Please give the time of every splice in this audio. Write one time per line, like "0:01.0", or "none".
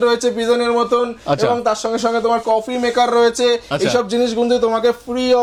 none